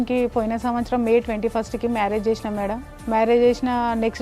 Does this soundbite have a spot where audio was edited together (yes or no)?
no